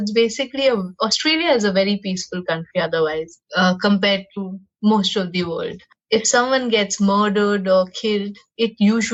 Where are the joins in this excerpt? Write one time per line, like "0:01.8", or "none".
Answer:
none